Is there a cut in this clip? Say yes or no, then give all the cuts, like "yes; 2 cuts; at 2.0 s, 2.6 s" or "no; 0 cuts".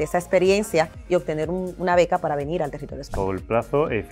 yes; 1 cut; at 3.1 s